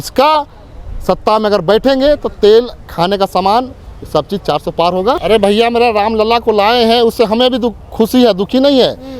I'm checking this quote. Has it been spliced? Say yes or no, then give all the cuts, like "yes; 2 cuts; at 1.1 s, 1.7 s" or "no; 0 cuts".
yes; 1 cut; at 5.2 s